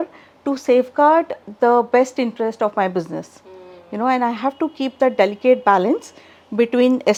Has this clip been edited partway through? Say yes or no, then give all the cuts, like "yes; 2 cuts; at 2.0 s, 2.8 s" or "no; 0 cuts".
no; 0 cuts